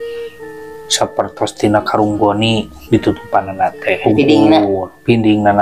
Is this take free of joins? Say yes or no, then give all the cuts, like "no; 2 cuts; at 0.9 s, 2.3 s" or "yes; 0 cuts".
no; 1 cut; at 4.0 s